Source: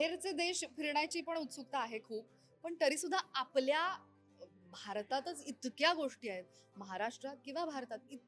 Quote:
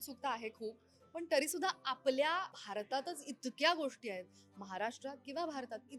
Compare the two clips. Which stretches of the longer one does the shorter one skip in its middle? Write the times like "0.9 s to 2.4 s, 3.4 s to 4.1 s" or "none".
4.1 s to 4.8 s